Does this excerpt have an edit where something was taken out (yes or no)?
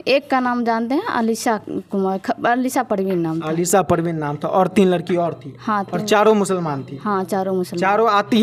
no